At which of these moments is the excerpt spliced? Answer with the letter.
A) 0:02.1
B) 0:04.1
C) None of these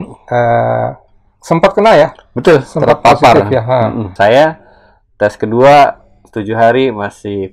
B